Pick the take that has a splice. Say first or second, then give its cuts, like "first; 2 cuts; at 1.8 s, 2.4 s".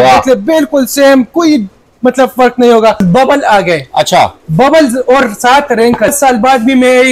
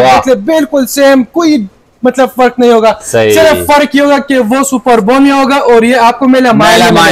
first; 2 cuts; at 3.0 s, 6.1 s